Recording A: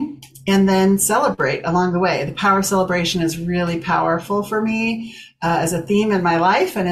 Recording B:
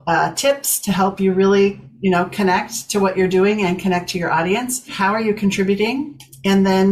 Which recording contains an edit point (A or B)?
B